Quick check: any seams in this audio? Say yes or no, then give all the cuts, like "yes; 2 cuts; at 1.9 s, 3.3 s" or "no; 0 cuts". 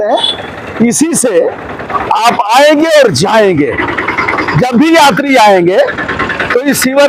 no; 0 cuts